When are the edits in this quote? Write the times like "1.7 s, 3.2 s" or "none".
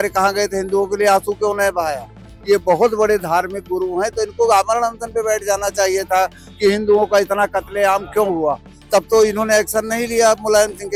none